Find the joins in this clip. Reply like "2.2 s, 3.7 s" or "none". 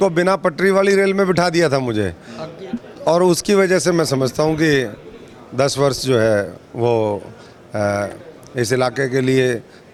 none